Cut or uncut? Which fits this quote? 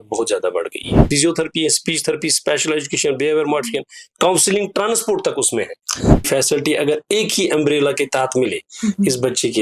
cut